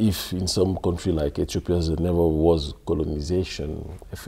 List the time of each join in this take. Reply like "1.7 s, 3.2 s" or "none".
none